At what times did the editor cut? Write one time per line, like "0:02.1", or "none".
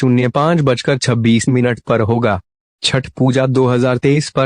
0:01.8